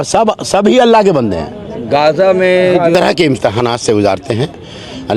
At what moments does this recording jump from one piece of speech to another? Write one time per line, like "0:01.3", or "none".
none